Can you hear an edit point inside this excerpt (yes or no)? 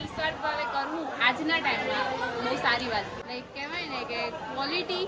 yes